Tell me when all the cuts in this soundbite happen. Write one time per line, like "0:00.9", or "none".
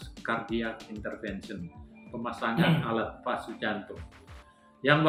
none